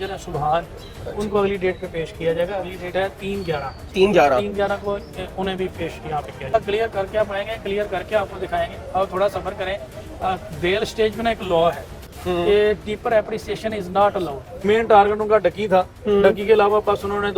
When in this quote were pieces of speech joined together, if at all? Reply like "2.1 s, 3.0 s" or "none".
6.5 s, 14.5 s